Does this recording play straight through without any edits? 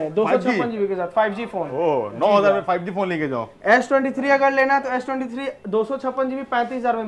yes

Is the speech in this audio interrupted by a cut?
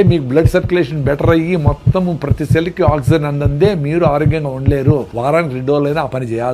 yes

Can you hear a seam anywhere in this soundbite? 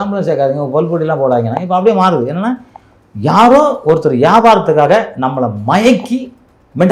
no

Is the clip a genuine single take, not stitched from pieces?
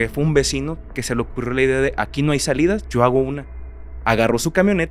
yes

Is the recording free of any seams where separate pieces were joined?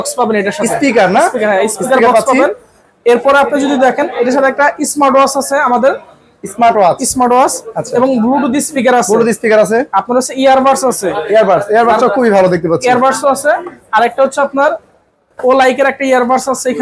yes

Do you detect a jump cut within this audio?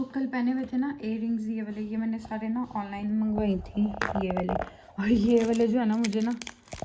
no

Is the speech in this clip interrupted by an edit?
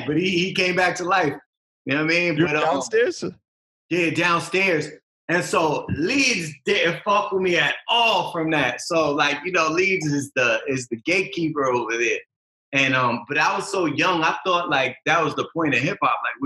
no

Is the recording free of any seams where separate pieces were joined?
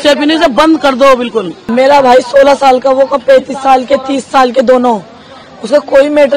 no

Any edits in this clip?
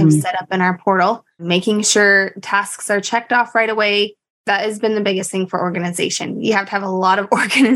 no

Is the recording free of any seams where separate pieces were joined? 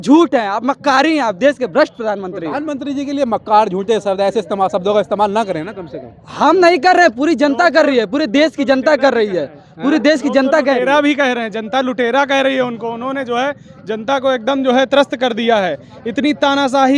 yes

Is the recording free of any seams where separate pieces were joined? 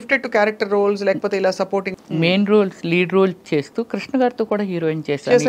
no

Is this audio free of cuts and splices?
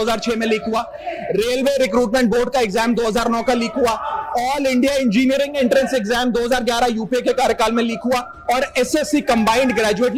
yes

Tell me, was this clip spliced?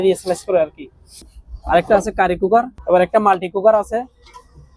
yes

